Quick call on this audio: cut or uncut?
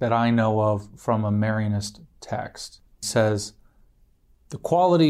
cut